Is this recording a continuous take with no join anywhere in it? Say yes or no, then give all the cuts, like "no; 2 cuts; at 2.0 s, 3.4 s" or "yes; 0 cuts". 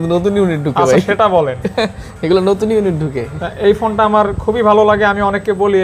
yes; 0 cuts